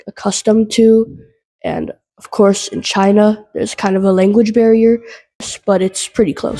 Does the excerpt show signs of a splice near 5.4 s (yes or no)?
yes